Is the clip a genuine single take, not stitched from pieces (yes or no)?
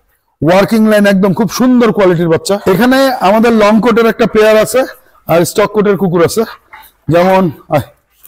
no